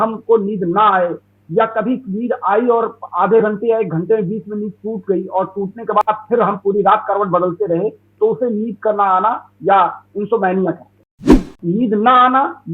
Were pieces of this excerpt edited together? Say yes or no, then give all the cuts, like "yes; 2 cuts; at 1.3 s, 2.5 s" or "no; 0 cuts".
yes; 1 cut; at 11.5 s